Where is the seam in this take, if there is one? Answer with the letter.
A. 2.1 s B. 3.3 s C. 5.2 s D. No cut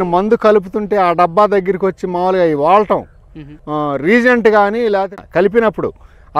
D